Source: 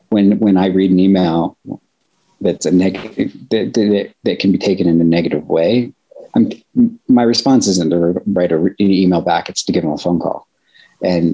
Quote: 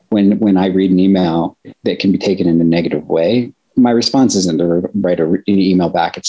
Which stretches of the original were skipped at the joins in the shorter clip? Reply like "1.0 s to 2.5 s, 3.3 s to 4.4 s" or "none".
1.7 s to 4.1 s, 6.1 s to 7.0 s

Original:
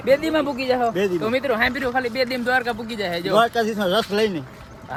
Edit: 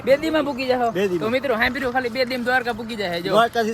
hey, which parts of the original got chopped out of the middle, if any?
none

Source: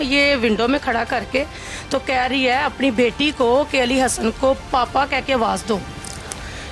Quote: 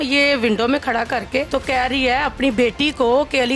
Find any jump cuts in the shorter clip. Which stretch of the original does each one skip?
1.5 s to 1.9 s

